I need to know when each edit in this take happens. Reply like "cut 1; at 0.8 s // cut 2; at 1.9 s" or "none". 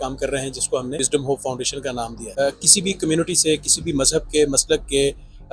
cut 1; at 1.0 s // cut 2; at 2.2 s

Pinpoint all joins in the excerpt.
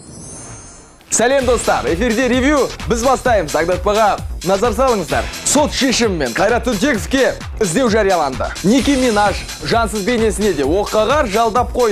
cut 1; at 0.9 s

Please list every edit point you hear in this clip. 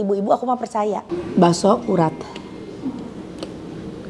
cut 1; at 1.2 s

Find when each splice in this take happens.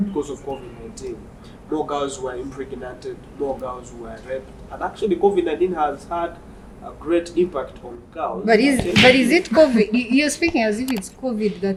none

